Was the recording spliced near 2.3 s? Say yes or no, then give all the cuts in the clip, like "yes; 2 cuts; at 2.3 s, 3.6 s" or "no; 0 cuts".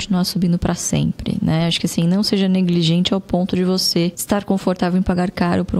no; 1 cut; at 4.2 s